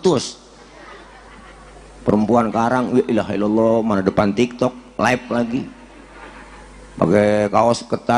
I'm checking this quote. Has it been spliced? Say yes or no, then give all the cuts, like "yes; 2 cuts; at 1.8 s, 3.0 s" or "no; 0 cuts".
no; 0 cuts